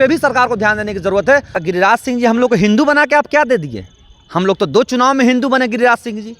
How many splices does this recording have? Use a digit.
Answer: 1